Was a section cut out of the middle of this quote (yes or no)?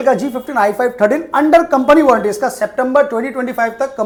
no